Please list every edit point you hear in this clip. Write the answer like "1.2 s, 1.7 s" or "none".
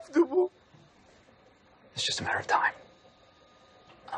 0.9 s